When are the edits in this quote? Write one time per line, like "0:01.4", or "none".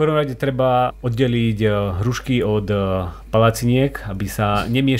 none